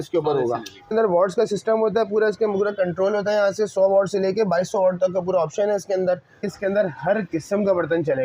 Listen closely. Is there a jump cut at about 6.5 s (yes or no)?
yes